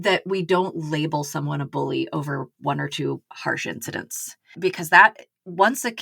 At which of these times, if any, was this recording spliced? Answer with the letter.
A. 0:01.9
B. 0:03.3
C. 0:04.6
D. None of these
C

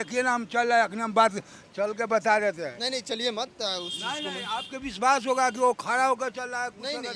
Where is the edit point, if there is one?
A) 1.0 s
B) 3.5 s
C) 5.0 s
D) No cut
D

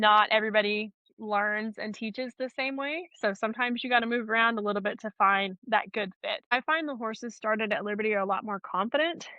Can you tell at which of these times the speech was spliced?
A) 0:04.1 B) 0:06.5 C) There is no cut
B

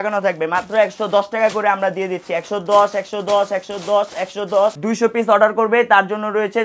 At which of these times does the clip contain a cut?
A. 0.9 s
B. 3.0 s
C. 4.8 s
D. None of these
C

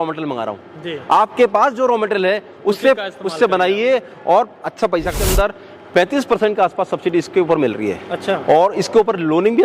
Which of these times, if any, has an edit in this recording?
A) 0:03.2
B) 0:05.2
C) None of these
B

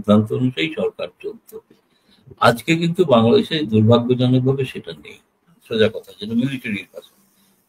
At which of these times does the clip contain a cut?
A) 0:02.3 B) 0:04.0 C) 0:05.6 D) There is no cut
C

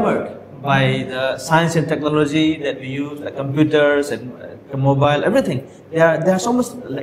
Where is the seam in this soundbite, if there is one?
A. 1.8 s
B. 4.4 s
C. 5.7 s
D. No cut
D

